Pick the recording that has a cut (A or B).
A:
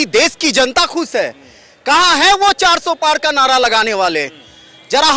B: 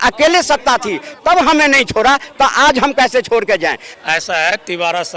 B